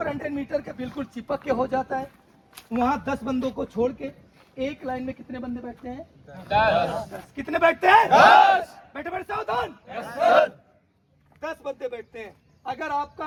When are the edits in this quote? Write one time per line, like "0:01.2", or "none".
none